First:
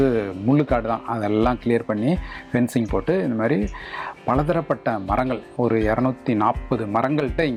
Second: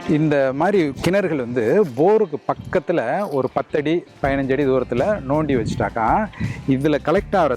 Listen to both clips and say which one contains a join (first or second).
second